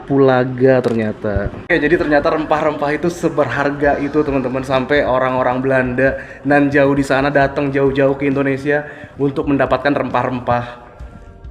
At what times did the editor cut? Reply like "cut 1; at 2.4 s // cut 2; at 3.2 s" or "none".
cut 1; at 1.7 s